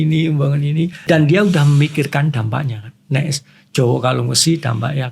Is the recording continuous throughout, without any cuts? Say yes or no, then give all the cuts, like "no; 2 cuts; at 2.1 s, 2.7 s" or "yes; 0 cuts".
no; 1 cut; at 1.0 s